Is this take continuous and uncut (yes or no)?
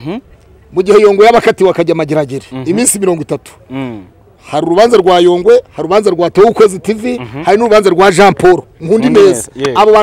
yes